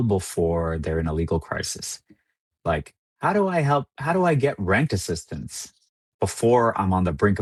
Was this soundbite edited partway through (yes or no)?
no